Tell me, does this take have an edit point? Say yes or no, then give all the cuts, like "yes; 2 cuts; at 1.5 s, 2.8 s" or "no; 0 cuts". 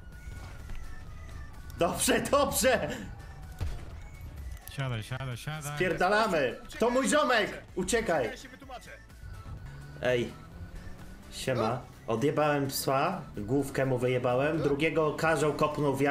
yes; 1 cut; at 9.7 s